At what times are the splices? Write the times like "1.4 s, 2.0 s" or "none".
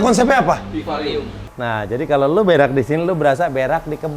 1.5 s